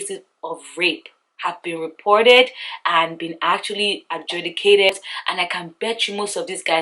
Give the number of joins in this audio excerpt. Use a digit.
1